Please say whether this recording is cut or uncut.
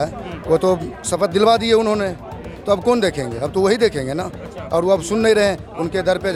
uncut